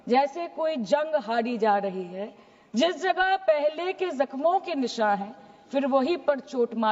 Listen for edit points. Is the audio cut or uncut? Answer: uncut